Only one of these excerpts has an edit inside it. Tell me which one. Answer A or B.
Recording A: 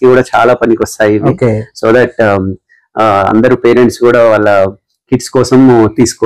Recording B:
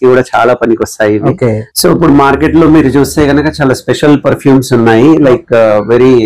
B